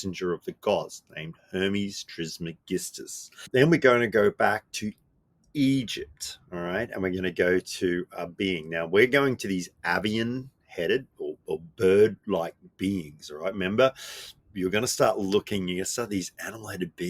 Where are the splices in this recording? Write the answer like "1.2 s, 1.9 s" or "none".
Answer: 3.5 s